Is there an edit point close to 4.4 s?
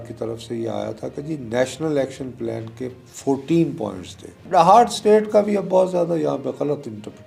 yes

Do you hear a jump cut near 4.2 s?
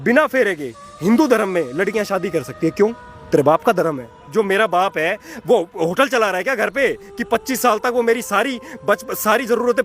yes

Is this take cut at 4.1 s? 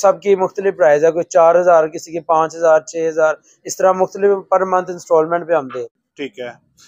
no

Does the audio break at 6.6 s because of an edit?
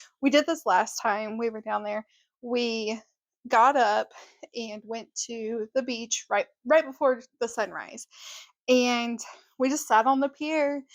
no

